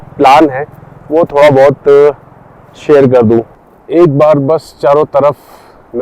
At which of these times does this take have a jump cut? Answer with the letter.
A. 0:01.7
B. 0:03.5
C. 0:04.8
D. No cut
B